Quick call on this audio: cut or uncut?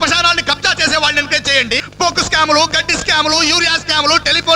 cut